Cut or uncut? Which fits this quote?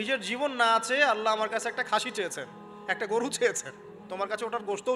cut